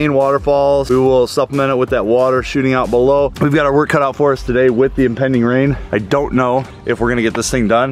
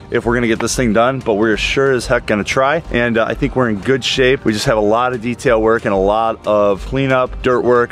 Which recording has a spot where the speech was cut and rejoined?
first; 2 cuts; at 0.8 s, 3.3 s

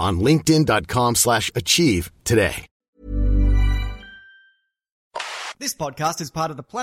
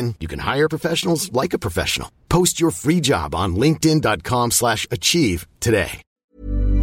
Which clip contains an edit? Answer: first; 1 cut; at 5.1 s

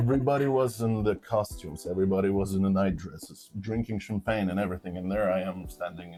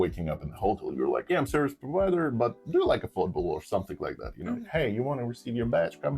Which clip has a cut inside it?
second; 2 cuts; at 1.2 s, 4.6 s

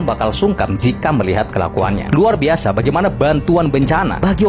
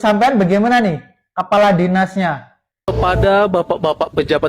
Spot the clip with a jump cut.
second; 1 cut; at 2.9 s

